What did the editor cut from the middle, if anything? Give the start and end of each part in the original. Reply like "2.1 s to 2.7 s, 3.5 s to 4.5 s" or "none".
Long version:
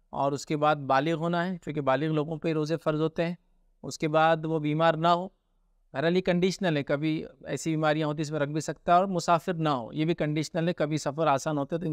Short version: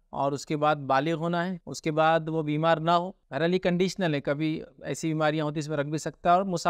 1.6 s to 3.8 s, 5.4 s to 5.8 s